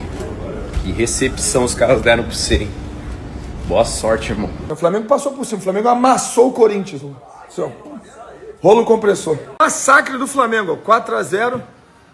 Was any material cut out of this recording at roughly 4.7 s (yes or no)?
yes